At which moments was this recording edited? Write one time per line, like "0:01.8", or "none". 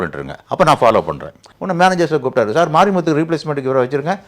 0:01.4